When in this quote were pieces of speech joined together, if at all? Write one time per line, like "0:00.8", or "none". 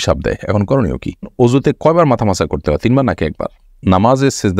0:01.3
0:03.6